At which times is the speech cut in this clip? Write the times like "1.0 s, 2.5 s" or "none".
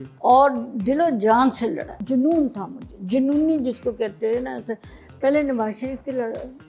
2.0 s